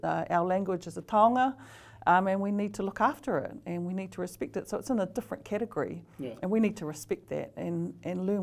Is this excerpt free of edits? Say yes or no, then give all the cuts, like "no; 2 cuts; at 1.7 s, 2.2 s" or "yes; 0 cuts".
yes; 0 cuts